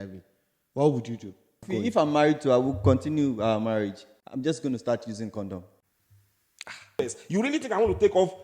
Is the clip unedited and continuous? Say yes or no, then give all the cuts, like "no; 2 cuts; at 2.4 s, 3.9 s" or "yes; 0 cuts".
no; 2 cuts; at 1.7 s, 7.0 s